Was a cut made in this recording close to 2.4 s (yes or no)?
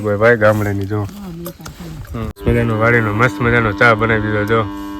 yes